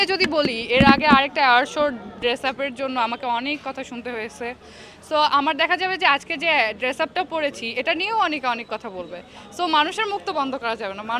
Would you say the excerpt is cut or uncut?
uncut